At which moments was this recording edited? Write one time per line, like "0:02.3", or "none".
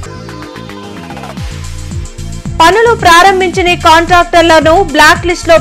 0:02.5